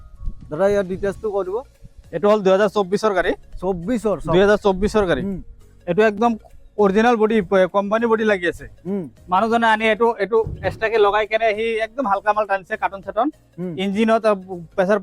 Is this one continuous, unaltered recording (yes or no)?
yes